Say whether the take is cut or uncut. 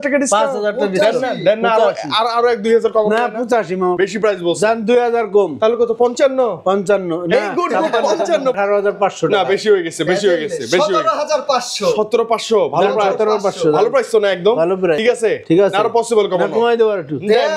cut